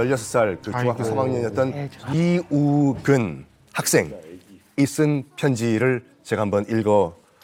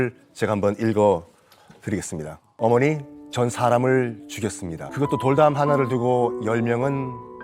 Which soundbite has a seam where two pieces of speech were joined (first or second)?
second